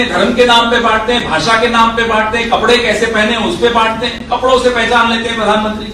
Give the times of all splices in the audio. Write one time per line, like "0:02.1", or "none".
none